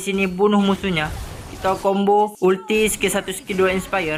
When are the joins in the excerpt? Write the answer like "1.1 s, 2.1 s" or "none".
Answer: none